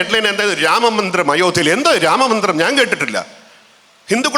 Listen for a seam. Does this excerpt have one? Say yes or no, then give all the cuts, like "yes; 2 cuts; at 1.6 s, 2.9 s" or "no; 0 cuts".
no; 0 cuts